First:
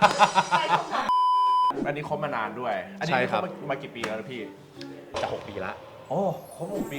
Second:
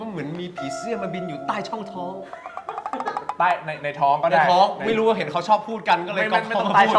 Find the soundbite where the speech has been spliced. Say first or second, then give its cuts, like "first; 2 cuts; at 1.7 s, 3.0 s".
first; 1 cut; at 1.7 s